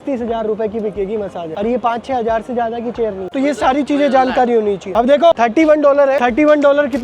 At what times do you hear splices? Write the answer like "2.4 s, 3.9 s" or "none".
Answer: none